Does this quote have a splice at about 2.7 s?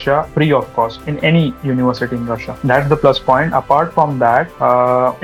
no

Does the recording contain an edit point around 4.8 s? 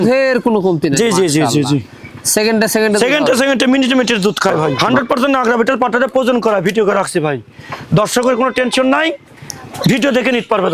yes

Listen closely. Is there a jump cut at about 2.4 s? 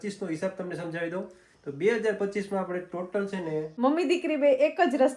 no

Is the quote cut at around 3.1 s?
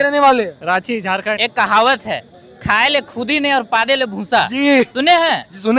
no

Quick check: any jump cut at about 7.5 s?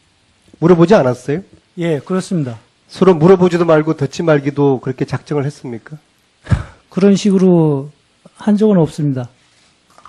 yes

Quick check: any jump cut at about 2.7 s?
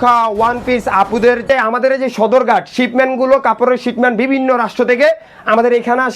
no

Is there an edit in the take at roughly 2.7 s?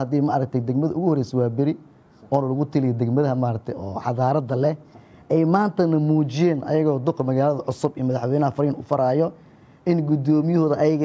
no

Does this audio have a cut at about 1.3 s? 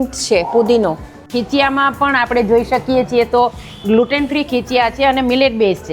yes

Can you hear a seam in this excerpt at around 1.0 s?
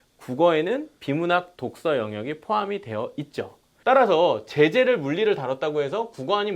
no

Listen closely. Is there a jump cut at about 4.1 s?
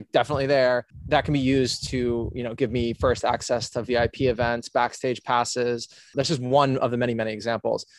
no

